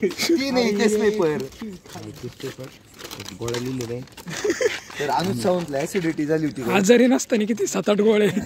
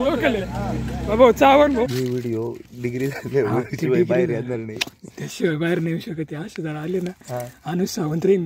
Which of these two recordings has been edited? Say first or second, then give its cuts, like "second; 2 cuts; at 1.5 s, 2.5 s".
second; 1 cut; at 1.9 s